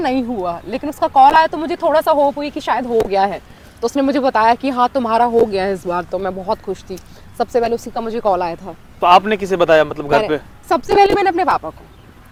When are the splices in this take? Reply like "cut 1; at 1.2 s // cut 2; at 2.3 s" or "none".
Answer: none